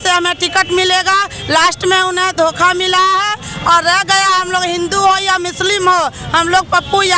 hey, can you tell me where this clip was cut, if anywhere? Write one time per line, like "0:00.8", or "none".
none